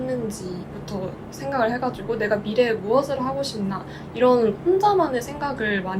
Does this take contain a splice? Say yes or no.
no